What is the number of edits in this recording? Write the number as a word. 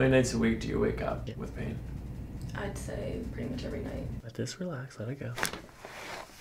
two